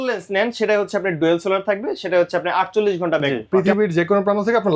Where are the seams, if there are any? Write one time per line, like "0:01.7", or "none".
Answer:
0:03.2